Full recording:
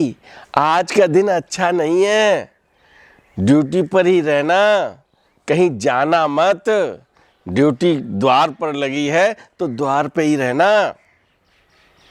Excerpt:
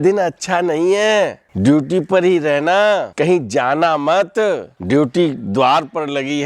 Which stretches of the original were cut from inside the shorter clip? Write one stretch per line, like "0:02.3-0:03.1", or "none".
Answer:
0:02.5-0:03.3
0:04.9-0:05.4
0:07.0-0:07.4